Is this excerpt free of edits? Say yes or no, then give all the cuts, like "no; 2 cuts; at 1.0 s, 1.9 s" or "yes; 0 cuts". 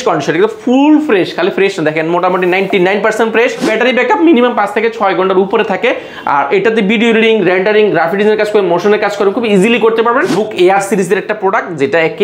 no; 2 cuts; at 3.7 s, 10.3 s